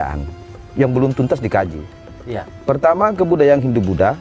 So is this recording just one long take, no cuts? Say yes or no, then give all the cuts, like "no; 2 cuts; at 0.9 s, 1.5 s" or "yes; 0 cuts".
yes; 0 cuts